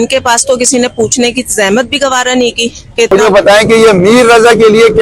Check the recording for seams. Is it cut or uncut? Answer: cut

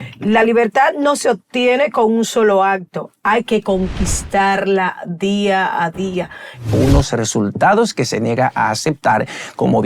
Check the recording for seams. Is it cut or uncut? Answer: cut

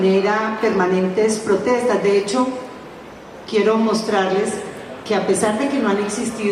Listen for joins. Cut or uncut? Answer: uncut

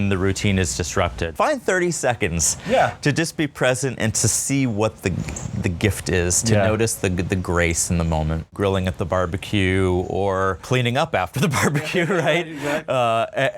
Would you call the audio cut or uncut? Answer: cut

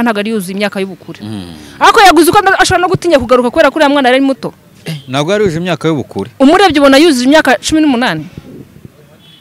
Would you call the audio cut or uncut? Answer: uncut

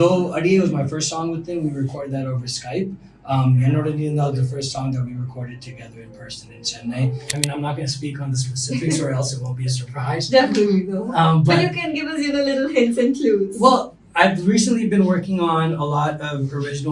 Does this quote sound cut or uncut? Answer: cut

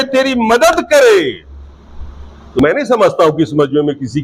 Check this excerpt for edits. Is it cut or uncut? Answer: cut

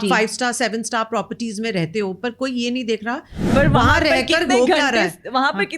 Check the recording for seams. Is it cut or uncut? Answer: cut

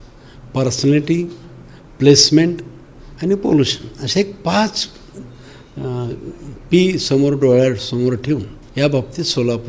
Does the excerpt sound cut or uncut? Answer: cut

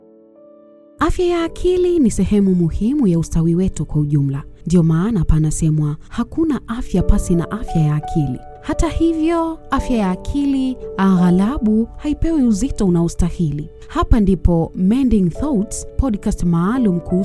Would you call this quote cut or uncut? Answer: cut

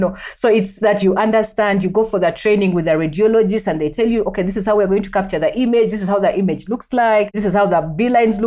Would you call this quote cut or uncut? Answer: cut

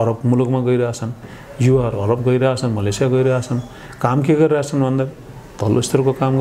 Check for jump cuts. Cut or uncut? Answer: uncut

